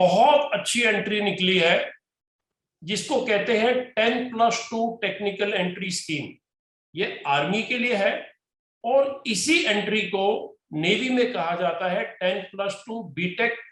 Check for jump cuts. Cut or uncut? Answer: uncut